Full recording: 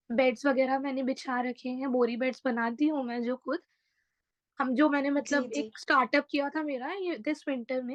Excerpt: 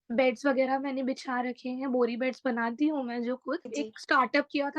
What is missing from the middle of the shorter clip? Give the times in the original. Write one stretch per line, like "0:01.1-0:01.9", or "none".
0:03.7-0:05.5